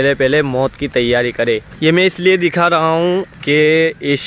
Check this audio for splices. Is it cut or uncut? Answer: cut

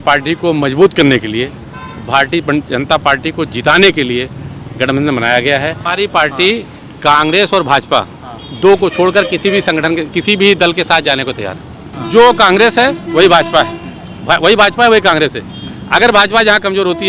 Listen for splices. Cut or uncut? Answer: cut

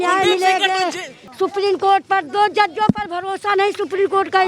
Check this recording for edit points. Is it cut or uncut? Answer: cut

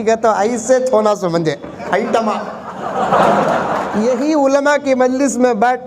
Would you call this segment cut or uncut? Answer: cut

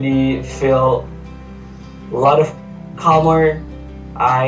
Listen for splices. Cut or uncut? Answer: uncut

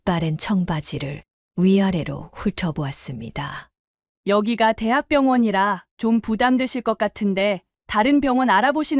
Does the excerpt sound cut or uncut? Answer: uncut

